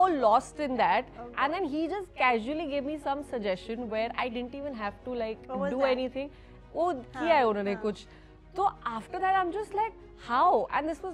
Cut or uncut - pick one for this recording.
uncut